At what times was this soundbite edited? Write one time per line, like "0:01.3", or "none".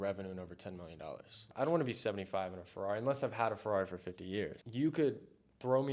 0:01.5
0:04.6